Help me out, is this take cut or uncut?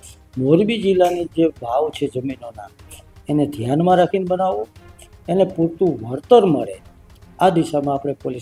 uncut